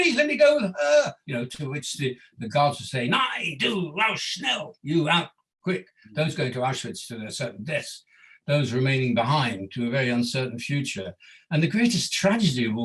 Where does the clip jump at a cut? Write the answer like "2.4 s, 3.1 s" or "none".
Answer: 1.2 s